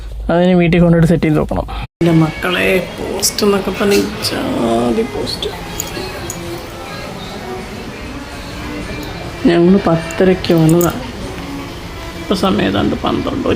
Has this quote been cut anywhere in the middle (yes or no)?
yes